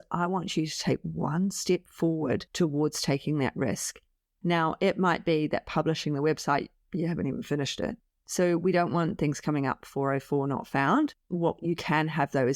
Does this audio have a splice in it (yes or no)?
no